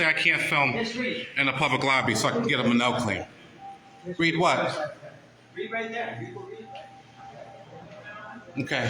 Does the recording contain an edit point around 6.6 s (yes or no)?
yes